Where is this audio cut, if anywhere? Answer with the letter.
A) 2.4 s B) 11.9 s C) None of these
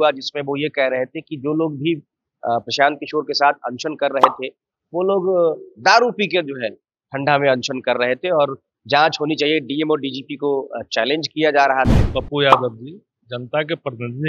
B